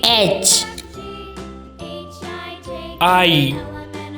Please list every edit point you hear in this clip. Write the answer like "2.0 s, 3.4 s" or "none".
none